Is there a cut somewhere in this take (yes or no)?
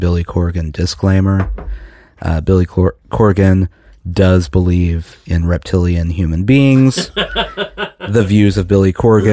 no